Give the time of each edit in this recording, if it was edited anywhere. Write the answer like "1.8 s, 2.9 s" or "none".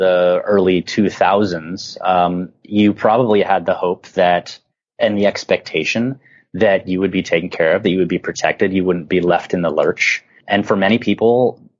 10.3 s